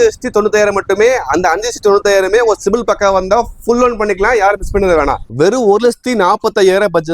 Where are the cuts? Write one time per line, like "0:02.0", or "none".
none